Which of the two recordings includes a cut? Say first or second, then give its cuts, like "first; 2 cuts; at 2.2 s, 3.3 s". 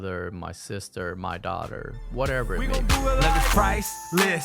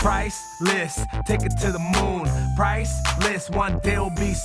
first; 1 cut; at 2.6 s